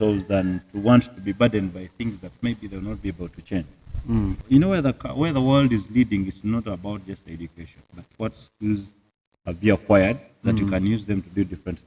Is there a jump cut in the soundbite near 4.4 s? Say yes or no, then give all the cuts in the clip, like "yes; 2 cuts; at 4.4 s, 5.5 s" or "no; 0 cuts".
yes; 1 cut; at 4.4 s